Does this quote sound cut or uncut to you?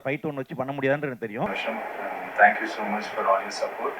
cut